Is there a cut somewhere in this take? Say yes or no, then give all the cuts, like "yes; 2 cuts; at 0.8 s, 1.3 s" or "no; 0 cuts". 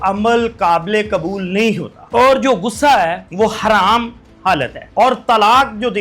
yes; 3 cuts; at 1.9 s, 3.2 s, 4.8 s